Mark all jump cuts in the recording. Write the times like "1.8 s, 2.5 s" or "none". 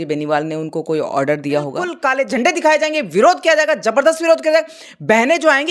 1.9 s

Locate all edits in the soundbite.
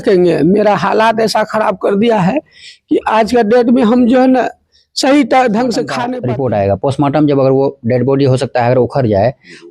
6.0 s

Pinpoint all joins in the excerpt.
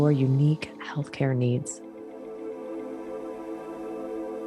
1.7 s

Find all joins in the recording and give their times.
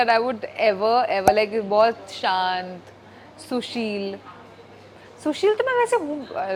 none

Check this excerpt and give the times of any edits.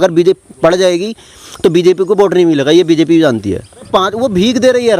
3.8 s

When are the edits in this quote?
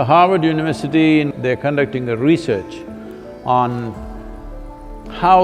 1.3 s

